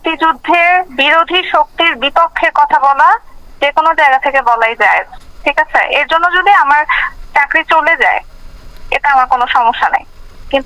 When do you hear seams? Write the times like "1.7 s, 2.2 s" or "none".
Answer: 0.9 s